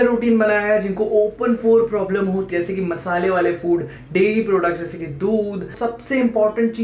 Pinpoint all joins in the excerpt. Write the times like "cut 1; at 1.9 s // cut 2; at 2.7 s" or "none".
cut 1; at 2.5 s // cut 2; at 5.8 s